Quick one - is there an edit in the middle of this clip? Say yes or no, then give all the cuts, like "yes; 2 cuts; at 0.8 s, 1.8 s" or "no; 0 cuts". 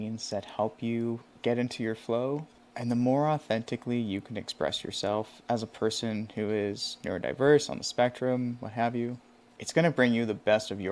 no; 0 cuts